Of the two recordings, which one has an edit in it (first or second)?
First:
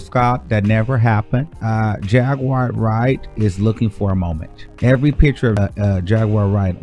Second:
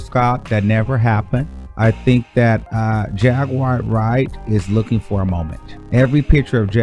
first